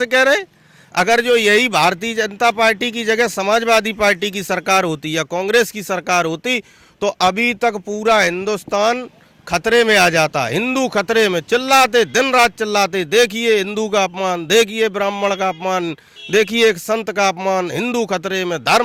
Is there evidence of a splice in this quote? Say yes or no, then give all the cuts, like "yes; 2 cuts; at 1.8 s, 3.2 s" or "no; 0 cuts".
no; 0 cuts